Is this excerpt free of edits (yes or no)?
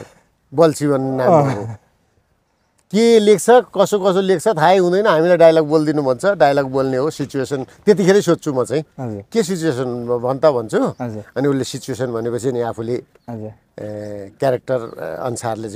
yes